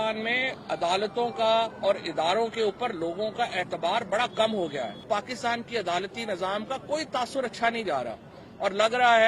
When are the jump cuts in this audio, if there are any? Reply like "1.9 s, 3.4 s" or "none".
5.1 s